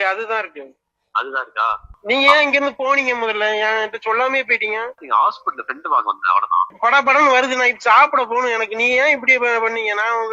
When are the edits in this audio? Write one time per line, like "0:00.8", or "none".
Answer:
0:02.0
0:05.0
0:06.7